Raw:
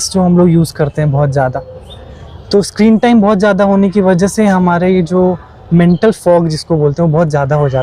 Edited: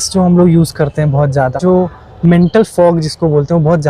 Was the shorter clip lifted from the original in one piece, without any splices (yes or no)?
no